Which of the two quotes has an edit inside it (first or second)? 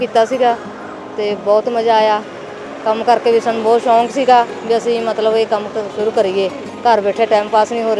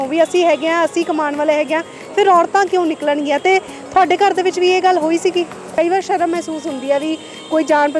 second